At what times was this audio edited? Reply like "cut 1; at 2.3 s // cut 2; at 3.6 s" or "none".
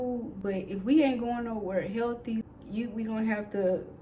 cut 1; at 2.4 s